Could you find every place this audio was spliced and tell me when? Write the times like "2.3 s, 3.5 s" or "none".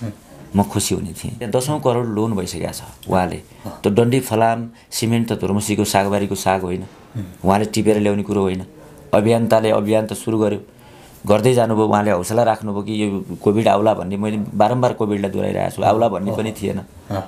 1.5 s